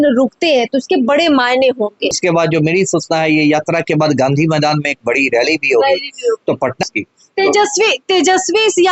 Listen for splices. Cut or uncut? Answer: cut